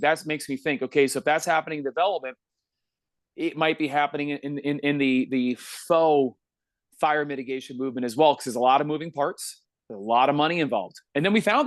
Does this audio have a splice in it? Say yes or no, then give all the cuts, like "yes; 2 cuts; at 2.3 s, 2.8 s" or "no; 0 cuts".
no; 0 cuts